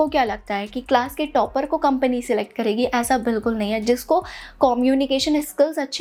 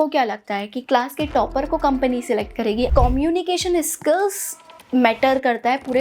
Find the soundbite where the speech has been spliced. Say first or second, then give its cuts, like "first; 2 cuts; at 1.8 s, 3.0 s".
second; 1 cut; at 2.9 s